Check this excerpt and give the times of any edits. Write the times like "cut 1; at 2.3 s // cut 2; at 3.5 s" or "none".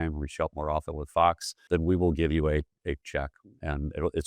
cut 1; at 1.5 s